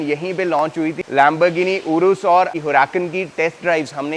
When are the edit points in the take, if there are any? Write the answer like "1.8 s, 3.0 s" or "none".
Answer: 1.0 s, 2.5 s